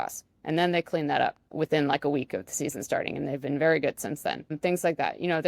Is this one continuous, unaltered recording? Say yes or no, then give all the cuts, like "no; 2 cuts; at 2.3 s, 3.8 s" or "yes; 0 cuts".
no; 2 cuts; at 1.5 s, 4.5 s